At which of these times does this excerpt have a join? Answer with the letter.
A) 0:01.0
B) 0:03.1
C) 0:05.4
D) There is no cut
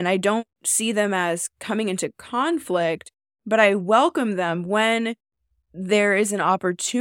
D